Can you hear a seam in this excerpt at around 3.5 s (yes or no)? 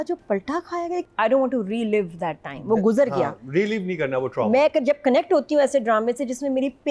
no